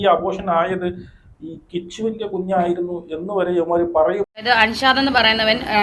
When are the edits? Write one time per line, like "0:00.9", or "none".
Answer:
0:04.4